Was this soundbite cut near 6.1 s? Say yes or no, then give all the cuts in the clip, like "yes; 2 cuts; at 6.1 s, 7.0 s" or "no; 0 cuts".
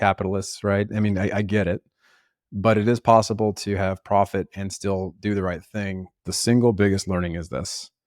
yes; 1 cut; at 6.1 s